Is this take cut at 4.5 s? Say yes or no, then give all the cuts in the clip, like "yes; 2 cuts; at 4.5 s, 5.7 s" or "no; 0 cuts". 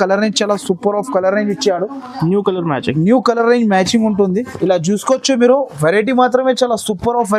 yes; 1 cut; at 4.5 s